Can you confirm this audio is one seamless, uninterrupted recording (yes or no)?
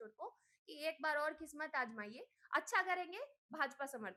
yes